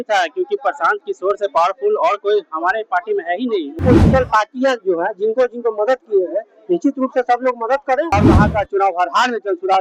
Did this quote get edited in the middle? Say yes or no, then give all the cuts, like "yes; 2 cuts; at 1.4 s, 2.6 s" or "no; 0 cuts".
yes; 2 cuts; at 3.8 s, 8.1 s